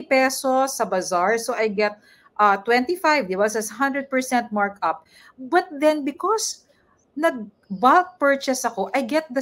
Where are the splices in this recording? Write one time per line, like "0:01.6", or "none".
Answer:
none